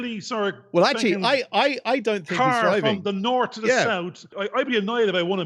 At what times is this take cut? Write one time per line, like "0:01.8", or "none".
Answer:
0:04.3

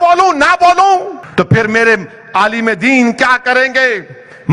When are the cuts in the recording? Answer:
0:01.2

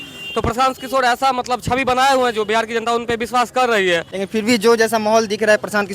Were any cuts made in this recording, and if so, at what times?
0:04.1

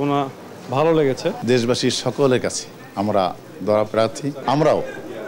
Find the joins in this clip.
0:01.4
0:04.3

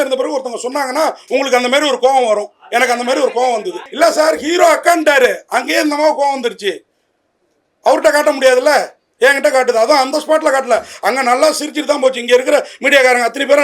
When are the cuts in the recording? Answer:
0:03.8

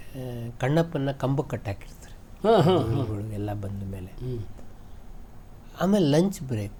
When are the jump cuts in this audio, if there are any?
none

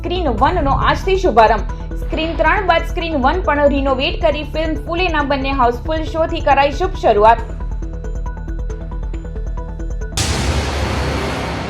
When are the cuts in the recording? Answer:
0:10.1

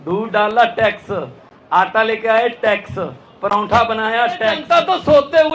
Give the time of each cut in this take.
0:04.6

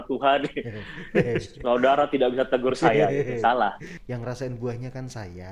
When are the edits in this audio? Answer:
0:03.9

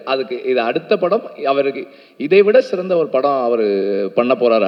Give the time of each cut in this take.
none

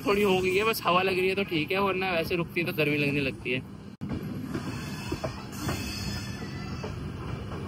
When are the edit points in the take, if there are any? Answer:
none

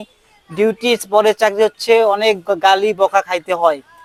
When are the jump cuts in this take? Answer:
none

